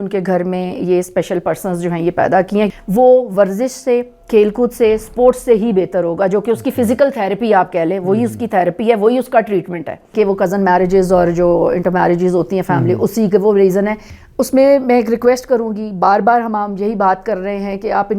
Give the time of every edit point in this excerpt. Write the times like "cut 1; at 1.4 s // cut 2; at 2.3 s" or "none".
cut 1; at 2.7 s // cut 2; at 10.1 s // cut 3; at 14.1 s